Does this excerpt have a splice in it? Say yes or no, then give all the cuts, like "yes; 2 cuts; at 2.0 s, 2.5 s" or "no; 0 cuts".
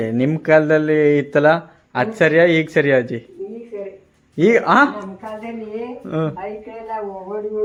no; 0 cuts